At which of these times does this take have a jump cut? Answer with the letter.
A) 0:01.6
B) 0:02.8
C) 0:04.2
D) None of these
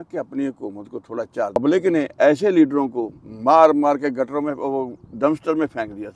A